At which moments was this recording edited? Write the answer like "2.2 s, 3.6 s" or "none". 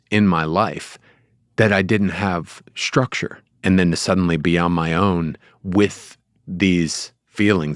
3.5 s